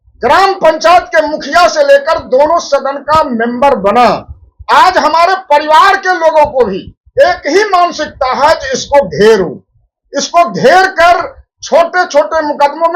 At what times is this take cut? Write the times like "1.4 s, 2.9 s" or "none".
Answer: none